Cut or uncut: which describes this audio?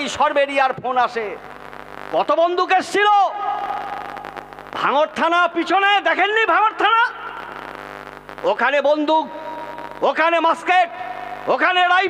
uncut